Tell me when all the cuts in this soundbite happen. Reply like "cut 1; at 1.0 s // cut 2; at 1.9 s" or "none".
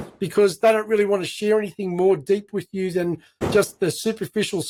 none